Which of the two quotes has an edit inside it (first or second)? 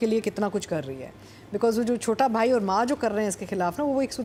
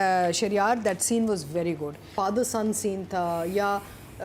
second